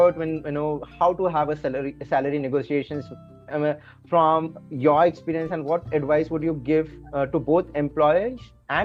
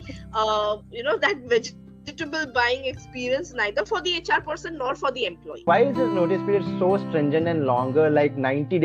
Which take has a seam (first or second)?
second